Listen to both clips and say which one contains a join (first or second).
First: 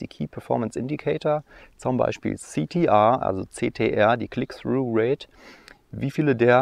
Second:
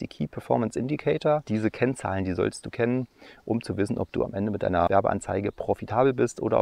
second